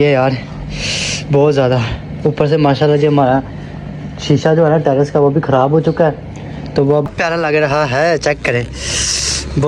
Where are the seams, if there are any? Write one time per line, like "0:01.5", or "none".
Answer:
0:07.1

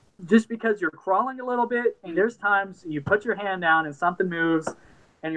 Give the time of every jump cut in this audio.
0:02.1

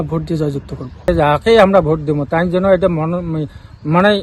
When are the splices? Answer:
0:01.1

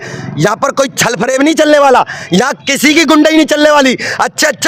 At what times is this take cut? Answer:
none

